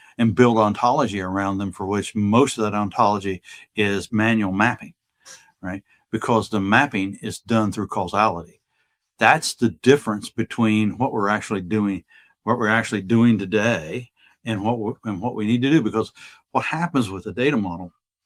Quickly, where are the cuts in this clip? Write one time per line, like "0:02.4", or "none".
none